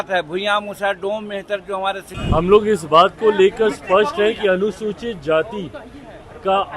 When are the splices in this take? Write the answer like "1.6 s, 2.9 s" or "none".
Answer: 2.1 s